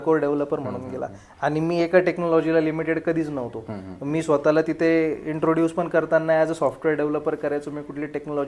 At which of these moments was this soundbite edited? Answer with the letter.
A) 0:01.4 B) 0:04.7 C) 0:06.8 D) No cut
D